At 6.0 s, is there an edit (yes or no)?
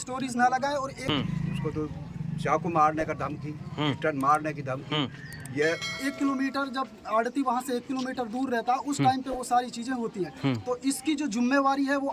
yes